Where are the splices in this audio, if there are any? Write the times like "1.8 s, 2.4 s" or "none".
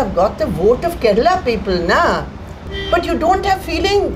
2.7 s